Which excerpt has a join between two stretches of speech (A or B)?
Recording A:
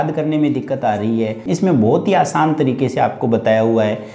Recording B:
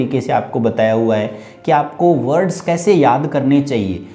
A